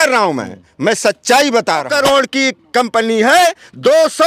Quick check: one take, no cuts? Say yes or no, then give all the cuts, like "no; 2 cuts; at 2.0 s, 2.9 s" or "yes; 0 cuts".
no; 1 cut; at 1.9 s